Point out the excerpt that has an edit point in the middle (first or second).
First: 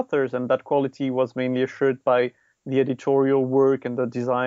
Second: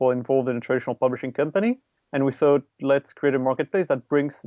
second